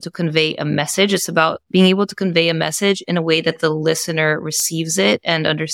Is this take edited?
yes; 1 cut; at 1.6 s

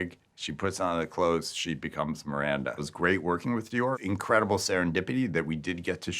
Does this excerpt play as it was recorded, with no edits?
no; 2 cuts; at 2.8 s, 3.9 s

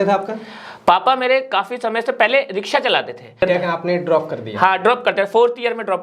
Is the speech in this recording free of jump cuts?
no; 1 cut; at 3.4 s

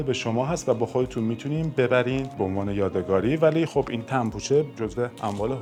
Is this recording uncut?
yes; 0 cuts

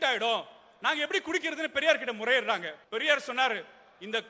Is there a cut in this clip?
yes; 1 cut; at 2.8 s

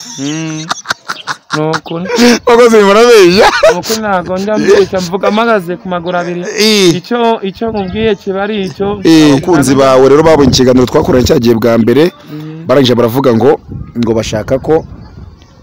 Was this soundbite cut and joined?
yes; 1 cut; at 9.4 s

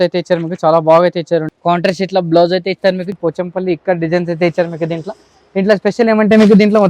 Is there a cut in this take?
yes; 2 cuts; at 1.5 s, 3.1 s

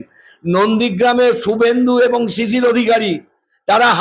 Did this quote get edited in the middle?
no; 0 cuts

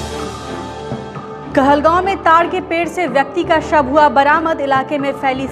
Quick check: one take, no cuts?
yes; 0 cuts

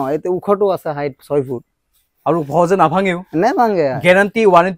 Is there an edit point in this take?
no; 0 cuts

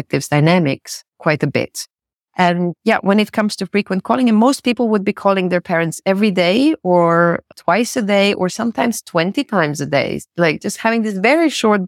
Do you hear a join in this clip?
no; 0 cuts

